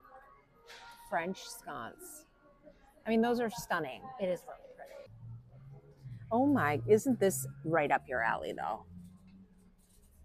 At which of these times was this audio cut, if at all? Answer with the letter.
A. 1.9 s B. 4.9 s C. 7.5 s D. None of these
B